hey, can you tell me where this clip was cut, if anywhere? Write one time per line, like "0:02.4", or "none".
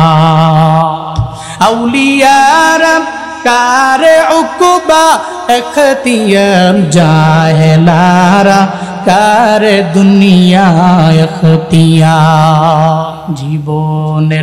0:13.2